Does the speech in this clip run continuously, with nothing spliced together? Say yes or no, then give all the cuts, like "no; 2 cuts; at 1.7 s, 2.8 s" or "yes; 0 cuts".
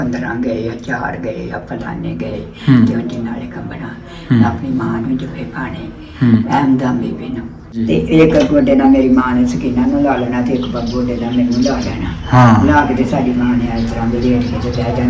no; 1 cut; at 7.8 s